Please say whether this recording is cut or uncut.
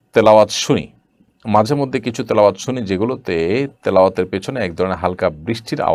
uncut